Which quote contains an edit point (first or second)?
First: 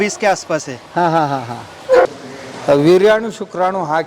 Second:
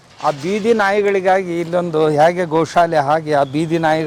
first